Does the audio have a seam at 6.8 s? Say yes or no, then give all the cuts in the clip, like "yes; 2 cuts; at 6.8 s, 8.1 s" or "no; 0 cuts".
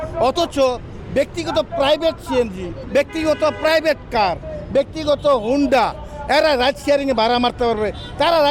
no; 1 cut; at 2.8 s